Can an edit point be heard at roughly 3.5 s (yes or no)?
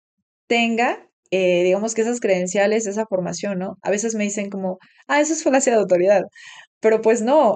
no